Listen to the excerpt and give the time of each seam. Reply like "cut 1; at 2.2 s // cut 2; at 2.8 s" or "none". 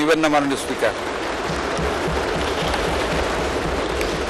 none